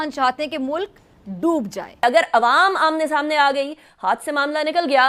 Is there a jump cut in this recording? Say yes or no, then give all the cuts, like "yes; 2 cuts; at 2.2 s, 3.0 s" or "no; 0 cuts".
yes; 1 cut; at 2.0 s